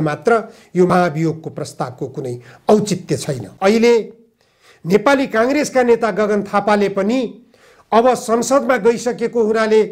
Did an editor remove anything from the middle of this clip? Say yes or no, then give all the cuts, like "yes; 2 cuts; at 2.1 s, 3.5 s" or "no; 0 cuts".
yes; 1 cut; at 3.4 s